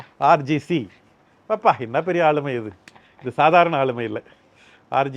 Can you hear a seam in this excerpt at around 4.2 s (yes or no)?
no